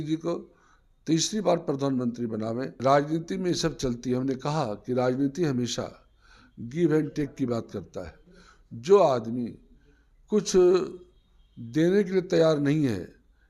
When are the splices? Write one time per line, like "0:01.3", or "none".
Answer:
0:02.7